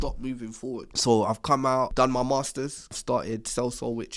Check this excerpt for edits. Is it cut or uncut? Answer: cut